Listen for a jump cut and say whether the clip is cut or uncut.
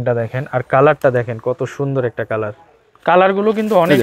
cut